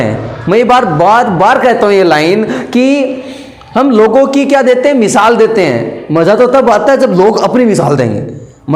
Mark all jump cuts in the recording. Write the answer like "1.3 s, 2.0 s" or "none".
none